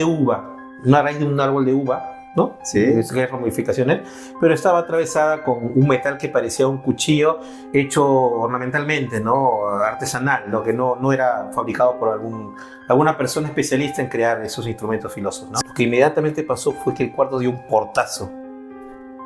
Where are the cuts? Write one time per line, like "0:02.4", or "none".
0:15.5